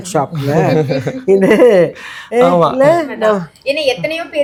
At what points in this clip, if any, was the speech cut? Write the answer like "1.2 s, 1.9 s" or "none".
none